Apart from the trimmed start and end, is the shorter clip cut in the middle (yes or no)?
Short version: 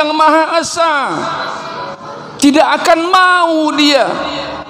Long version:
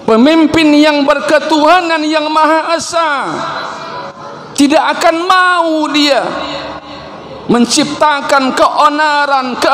no